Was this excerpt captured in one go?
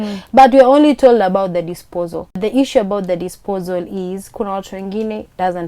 no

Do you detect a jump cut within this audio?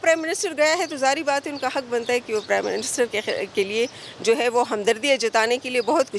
no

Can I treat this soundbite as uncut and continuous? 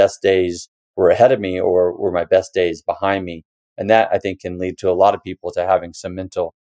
yes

